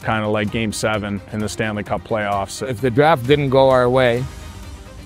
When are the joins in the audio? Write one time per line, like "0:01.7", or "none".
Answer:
0:02.6